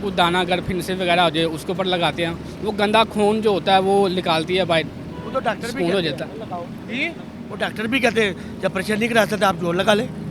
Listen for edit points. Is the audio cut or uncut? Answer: uncut